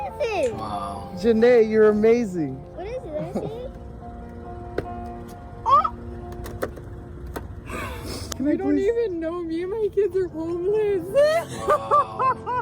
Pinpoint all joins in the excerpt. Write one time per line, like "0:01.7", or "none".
0:11.5